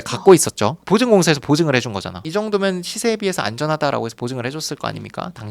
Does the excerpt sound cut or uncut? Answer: cut